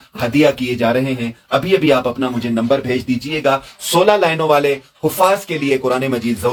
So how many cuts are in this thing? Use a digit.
0